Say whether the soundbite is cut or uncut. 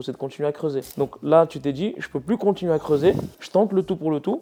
uncut